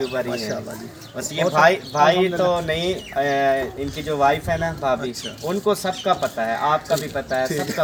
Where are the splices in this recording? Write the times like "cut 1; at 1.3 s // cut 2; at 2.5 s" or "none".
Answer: none